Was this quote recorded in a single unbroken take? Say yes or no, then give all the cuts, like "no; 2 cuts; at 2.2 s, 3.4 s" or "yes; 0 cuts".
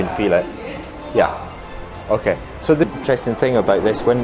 no; 1 cut; at 2.9 s